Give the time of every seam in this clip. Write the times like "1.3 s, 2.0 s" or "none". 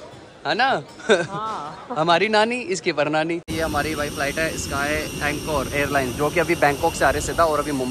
3.5 s